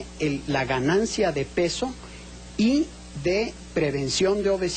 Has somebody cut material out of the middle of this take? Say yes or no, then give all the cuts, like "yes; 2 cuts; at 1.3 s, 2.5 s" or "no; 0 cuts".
no; 0 cuts